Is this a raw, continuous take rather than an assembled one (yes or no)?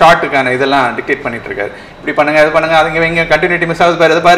yes